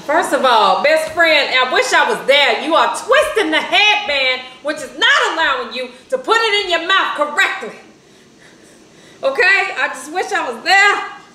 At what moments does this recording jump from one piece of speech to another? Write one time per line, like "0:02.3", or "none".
none